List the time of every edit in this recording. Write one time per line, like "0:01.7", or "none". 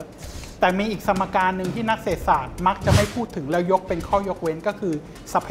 none